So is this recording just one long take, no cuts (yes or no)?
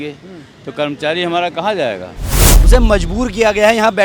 no